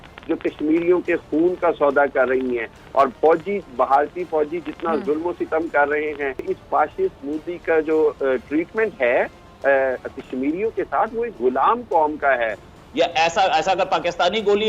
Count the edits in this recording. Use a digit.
2